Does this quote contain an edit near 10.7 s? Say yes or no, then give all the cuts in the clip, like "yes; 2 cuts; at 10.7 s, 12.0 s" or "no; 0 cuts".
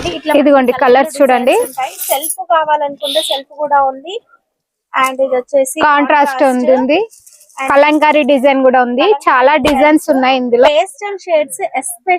yes; 1 cut; at 10.7 s